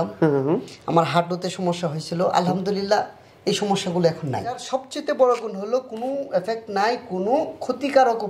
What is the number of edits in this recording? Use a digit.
1